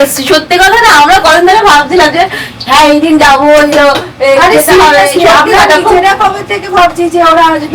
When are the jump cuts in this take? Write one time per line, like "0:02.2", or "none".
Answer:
none